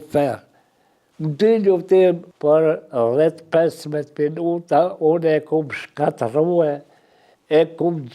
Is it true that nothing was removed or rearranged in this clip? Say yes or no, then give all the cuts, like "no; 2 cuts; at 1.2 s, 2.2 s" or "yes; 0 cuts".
no; 1 cut; at 2.3 s